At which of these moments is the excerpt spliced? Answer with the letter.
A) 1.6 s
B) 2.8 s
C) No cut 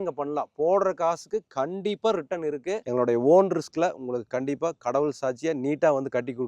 B